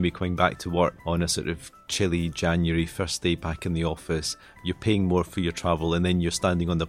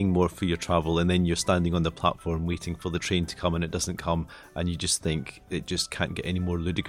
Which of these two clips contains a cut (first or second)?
first